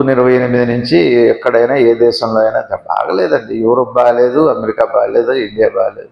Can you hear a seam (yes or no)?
no